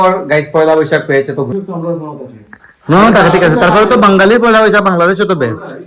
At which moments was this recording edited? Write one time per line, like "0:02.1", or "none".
0:01.5